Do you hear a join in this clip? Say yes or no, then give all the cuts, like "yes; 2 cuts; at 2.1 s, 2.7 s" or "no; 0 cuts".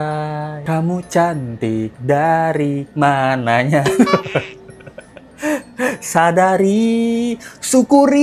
no; 0 cuts